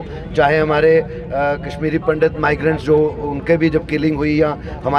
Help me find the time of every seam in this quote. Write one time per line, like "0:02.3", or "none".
none